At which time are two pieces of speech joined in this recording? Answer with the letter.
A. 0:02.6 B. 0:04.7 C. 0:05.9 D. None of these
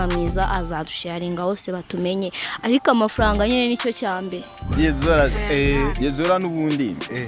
B